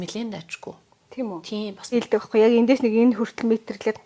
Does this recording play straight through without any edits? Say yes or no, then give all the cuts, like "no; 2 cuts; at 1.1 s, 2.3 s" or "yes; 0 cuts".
no; 1 cut; at 1.9 s